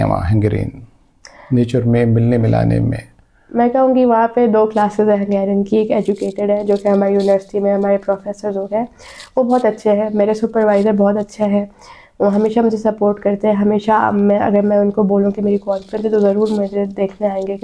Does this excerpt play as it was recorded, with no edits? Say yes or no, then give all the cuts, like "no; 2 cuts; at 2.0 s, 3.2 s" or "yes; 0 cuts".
yes; 0 cuts